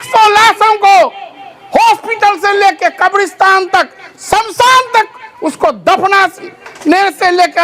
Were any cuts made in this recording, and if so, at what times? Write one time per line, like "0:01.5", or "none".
none